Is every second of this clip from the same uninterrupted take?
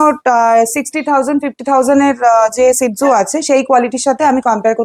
yes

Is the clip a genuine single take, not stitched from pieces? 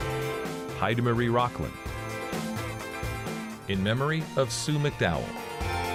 yes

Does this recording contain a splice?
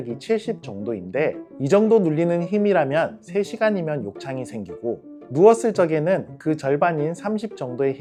no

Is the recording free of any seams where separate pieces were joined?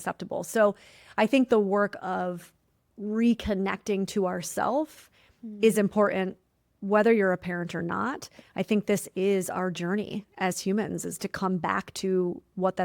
yes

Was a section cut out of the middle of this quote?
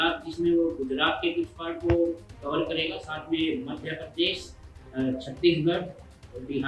no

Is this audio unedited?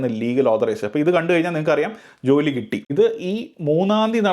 no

